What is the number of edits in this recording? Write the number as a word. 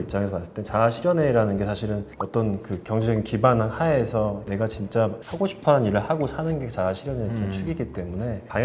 zero